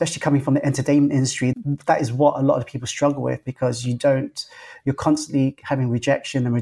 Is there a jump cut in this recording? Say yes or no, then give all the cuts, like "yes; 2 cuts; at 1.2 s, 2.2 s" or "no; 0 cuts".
no; 0 cuts